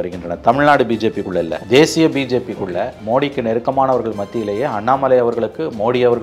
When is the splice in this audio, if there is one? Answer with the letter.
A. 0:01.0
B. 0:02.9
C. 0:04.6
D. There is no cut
B